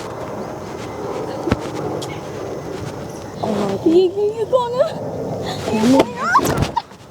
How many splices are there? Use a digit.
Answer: 1